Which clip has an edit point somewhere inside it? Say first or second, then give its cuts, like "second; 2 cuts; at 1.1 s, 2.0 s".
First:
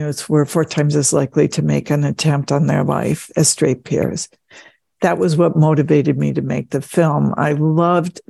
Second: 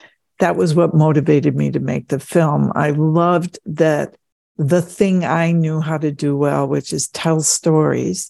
first; 1 cut; at 3.2 s